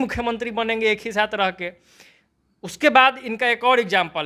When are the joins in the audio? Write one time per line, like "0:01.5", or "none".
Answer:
none